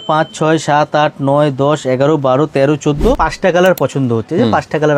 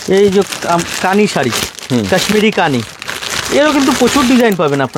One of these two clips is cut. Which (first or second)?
first